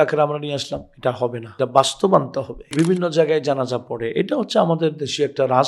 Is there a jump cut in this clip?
yes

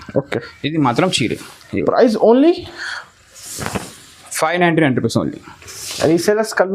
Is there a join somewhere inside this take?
no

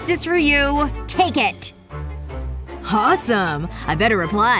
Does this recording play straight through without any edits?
yes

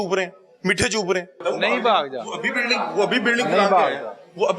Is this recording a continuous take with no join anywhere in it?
no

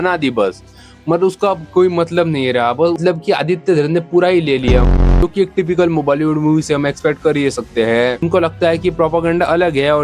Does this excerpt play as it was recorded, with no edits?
no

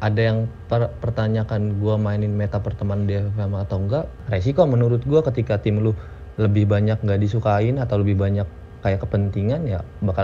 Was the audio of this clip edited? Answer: yes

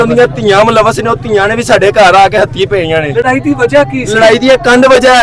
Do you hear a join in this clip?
no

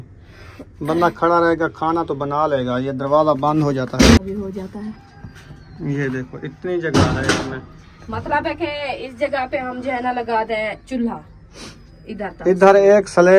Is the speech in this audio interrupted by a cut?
no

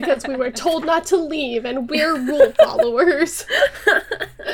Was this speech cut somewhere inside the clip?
no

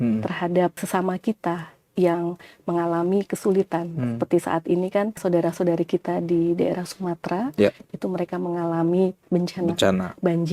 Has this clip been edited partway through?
yes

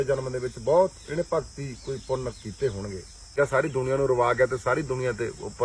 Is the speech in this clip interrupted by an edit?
yes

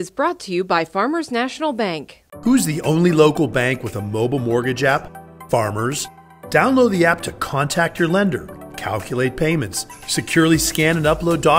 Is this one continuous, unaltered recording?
yes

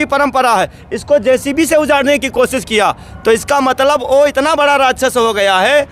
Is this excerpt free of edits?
yes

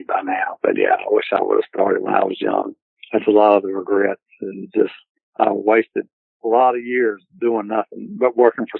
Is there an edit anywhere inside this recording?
no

